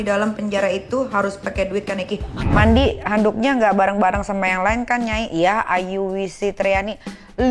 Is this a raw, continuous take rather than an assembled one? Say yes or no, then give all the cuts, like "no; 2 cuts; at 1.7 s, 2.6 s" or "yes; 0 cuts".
no; 1 cut; at 2.5 s